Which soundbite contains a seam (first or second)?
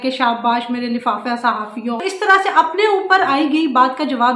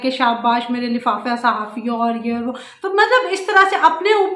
first